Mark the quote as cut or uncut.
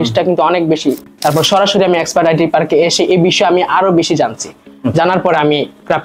cut